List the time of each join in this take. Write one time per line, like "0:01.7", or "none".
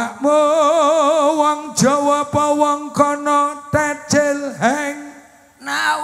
none